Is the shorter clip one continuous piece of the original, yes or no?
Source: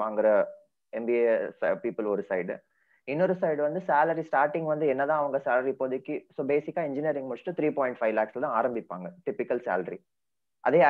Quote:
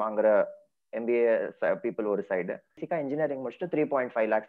no